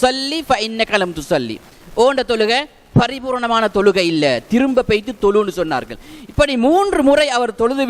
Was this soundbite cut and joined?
no; 0 cuts

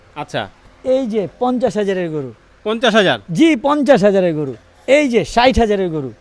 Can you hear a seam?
no; 0 cuts

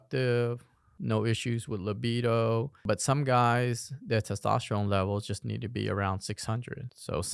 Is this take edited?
yes; 1 cut; at 2.8 s

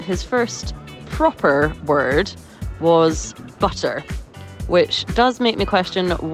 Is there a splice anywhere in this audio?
no; 0 cuts

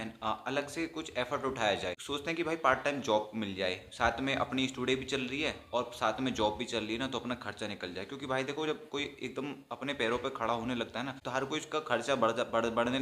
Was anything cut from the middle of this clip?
yes; 2 cuts; at 2.0 s, 11.2 s

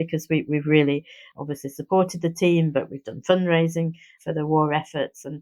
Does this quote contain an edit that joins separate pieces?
no; 0 cuts

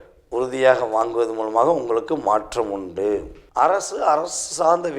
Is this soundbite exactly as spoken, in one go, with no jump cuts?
no; 1 cut; at 3.4 s

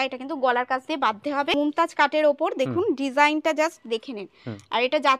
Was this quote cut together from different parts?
yes; 1 cut; at 1.5 s

